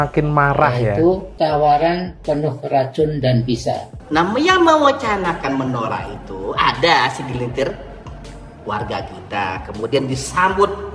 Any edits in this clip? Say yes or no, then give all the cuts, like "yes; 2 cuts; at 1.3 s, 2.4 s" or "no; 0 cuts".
yes; 1 cut; at 3.9 s